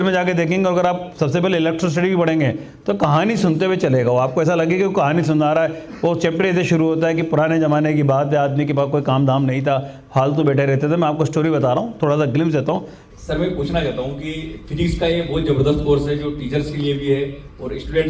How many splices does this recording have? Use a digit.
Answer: 1